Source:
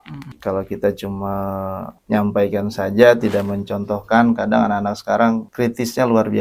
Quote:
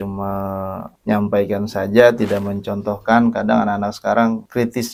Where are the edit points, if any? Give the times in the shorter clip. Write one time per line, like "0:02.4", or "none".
none